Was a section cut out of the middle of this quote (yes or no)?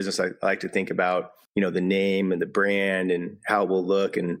yes